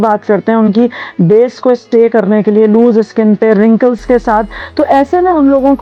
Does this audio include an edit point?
no; 0 cuts

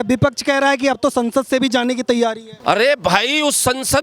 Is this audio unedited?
no; 1 cut; at 2.5 s

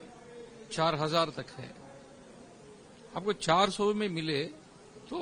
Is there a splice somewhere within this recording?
no; 0 cuts

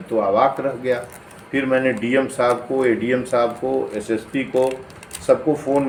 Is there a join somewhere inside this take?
no; 0 cuts

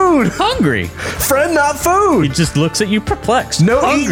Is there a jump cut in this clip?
no; 0 cuts

